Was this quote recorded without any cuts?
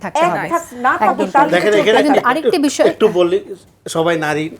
yes; 0 cuts

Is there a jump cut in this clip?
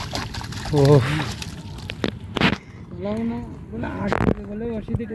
no; 0 cuts

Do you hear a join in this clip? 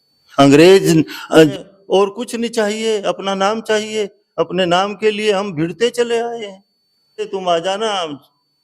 yes; 2 cuts; at 1.5 s, 7.3 s

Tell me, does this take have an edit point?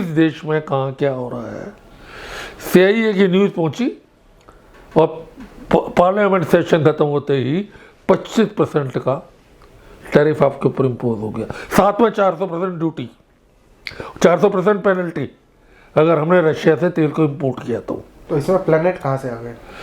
yes; 1 cut; at 18.1 s

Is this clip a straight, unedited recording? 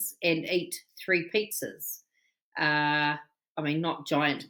yes; 0 cuts

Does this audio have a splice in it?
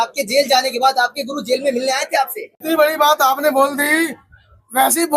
yes; 1 cut; at 2.5 s

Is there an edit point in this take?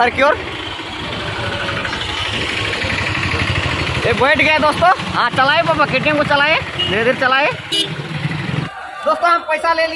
yes; 1 cut; at 8.5 s

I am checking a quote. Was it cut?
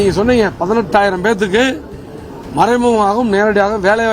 no; 0 cuts

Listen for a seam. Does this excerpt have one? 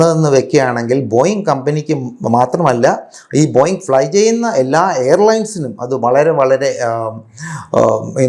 no; 0 cuts

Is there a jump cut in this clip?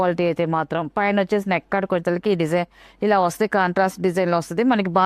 no; 0 cuts

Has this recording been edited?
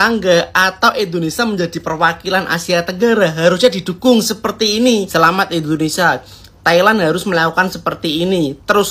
yes; 1 cut; at 5.1 s

